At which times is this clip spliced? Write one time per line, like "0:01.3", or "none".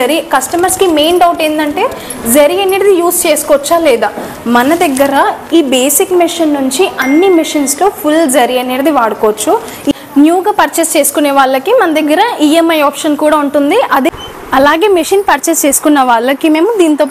0:09.9
0:14.1

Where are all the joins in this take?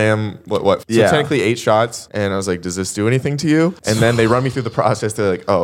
0:00.8
0:02.0
0:03.8

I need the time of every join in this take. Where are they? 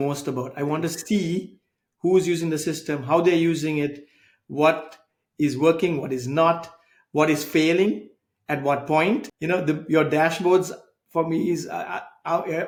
none

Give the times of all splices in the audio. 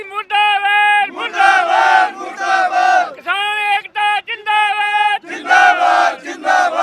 none

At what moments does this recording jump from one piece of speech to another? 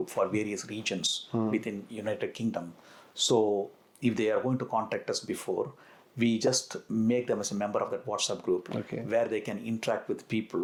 none

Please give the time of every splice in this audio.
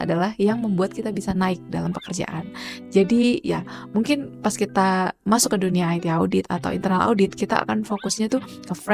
none

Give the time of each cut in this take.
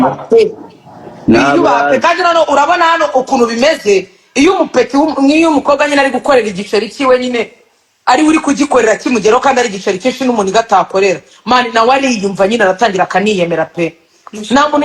none

